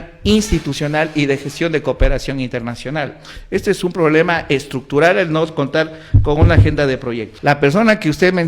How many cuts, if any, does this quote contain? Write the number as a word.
one